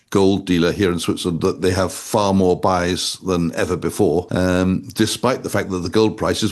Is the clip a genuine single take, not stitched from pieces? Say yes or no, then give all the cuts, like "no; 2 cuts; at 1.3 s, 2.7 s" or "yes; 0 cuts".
no; 1 cut; at 4.3 s